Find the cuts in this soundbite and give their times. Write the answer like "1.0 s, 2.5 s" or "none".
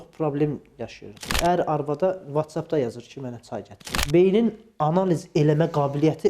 1.3 s, 4.0 s